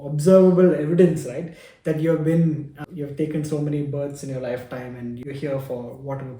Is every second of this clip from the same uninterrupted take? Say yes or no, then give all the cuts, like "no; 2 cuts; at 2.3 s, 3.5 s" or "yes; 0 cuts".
no; 2 cuts; at 2.7 s, 5.2 s